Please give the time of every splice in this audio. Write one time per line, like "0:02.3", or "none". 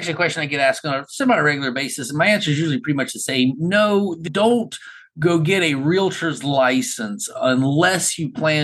none